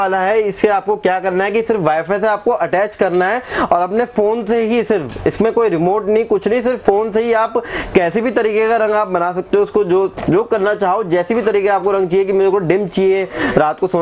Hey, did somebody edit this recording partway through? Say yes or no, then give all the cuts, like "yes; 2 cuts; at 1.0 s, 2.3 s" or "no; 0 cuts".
no; 0 cuts